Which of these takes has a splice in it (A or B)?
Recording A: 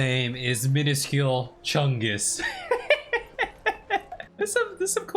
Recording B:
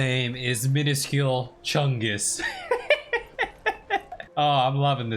B